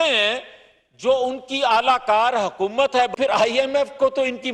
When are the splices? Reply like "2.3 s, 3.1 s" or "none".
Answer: none